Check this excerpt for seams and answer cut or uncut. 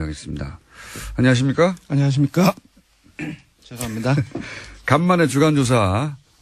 uncut